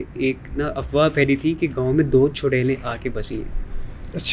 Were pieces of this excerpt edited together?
no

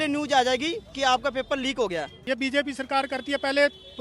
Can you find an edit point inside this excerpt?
yes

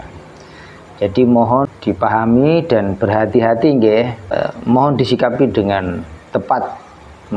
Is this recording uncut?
no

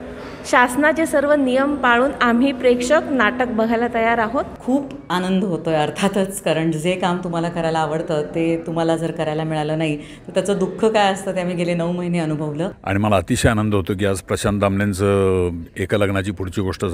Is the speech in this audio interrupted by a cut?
yes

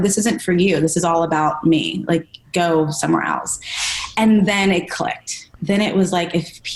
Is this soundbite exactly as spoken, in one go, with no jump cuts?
yes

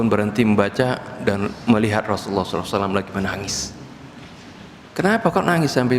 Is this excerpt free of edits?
no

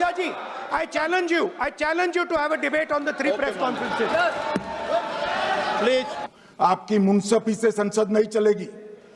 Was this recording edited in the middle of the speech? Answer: yes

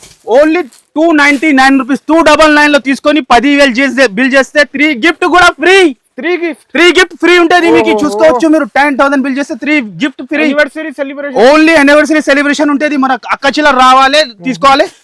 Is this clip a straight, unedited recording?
yes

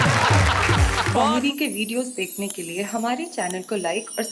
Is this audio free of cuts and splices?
no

